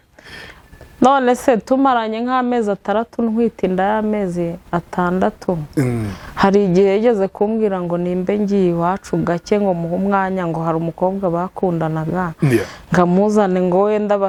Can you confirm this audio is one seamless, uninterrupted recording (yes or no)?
yes